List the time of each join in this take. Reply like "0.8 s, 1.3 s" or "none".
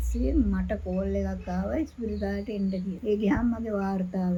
none

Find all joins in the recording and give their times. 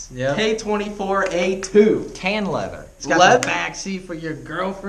2.9 s

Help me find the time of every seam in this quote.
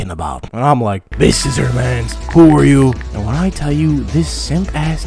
1.0 s

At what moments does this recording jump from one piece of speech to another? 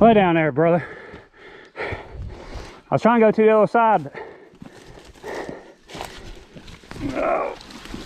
none

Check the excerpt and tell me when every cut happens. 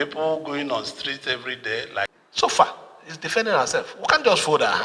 2.1 s

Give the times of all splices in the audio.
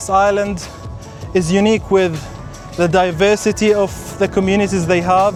none

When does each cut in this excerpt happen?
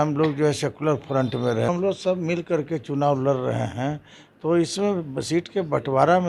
1.7 s

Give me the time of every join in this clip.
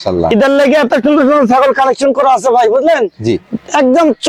none

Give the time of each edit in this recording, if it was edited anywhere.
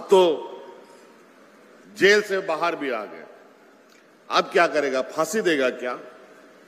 1.8 s

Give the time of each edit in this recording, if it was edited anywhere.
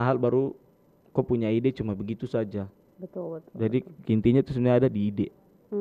none

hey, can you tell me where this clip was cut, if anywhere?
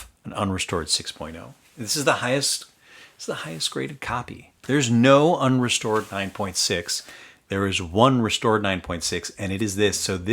1.6 s, 4.5 s

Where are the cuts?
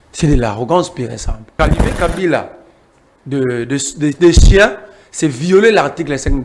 1.5 s

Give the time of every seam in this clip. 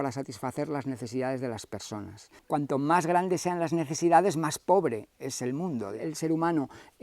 2.3 s, 6.0 s

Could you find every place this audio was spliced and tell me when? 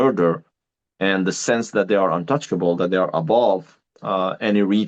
none

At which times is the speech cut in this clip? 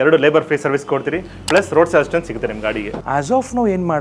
2.9 s

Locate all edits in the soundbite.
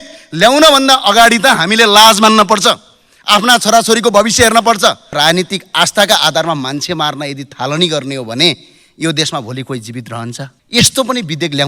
5.1 s, 10.5 s

